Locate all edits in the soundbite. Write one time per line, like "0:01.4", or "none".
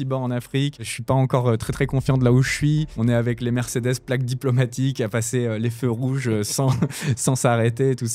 0:00.9